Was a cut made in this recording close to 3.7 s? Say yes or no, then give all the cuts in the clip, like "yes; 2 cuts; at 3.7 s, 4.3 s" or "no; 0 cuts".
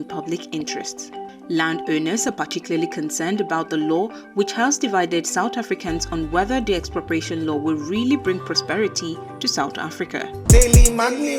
no; 1 cut; at 10.4 s